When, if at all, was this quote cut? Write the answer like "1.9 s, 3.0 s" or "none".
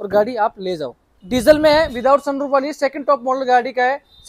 1.1 s